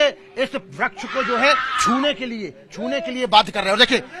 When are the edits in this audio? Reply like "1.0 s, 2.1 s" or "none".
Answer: none